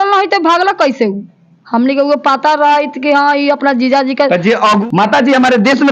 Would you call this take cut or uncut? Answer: cut